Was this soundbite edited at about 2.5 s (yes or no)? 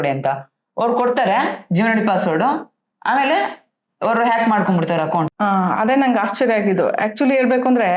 no